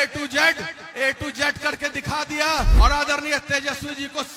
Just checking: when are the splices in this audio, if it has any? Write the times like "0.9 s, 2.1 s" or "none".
2.7 s